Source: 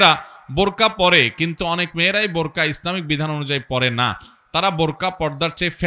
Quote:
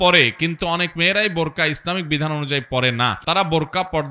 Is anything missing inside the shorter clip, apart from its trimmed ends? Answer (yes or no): yes